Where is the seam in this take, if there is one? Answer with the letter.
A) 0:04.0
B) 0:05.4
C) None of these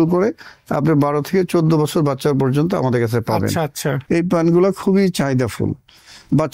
A